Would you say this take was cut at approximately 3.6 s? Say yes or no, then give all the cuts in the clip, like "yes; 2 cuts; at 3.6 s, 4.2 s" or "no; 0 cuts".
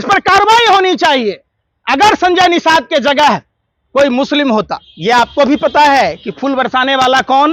no; 1 cut; at 4.8 s